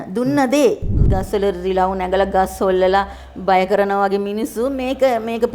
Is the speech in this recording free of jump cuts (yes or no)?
no